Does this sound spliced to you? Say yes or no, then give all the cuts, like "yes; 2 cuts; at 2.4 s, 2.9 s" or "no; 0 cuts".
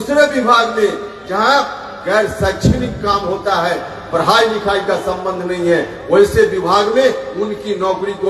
no; 0 cuts